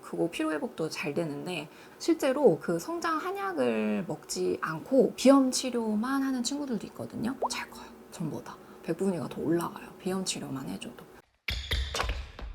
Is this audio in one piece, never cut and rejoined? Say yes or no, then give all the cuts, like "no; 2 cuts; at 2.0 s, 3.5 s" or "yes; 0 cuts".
no; 3 cuts; at 1.9 s, 7.4 s, 11.1 s